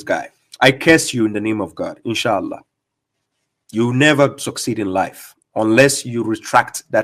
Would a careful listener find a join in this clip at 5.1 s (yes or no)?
no